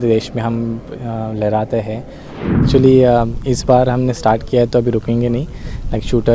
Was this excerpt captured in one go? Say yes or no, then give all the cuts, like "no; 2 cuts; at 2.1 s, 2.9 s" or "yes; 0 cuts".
no; 1 cut; at 2.6 s